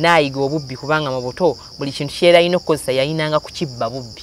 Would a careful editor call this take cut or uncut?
uncut